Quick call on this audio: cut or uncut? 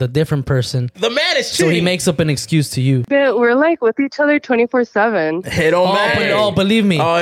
cut